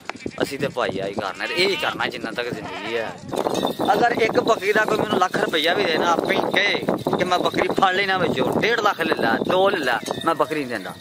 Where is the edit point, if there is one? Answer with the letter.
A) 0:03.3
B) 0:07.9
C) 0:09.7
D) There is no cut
A